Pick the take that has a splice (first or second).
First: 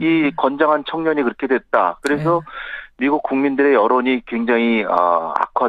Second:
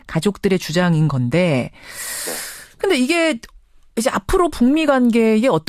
first